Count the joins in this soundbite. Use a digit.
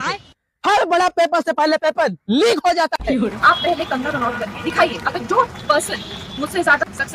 1